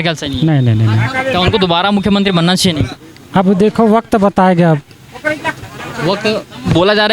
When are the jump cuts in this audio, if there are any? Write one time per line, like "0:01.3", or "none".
none